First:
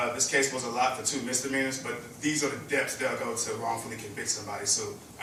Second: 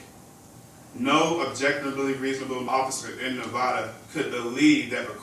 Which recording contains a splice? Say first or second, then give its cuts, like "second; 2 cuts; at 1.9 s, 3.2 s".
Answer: second; 1 cut; at 2.7 s